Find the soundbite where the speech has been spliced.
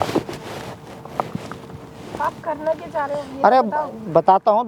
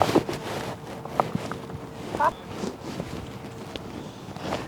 second; 1 cut; at 2.4 s

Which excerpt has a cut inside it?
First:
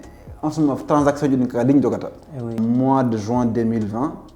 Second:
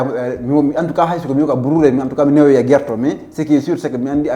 first; 1 cut; at 2.5 s

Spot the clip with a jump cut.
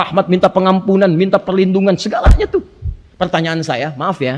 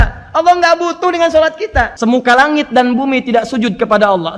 second; 1 cut; at 1.9 s

